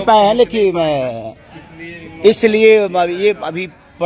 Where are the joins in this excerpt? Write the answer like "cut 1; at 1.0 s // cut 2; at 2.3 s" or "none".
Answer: none